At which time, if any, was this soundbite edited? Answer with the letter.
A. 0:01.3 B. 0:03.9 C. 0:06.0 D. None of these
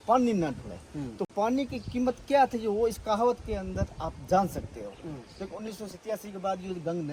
D